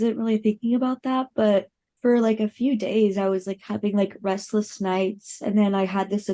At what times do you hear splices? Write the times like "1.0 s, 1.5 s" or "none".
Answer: 1.8 s